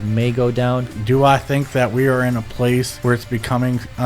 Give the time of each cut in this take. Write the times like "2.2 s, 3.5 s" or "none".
0.9 s, 2.9 s

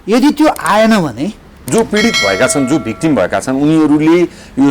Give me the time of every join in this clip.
1.5 s

